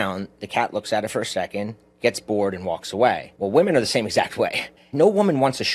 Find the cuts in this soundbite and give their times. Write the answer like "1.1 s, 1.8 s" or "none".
1.8 s, 3.3 s, 4.8 s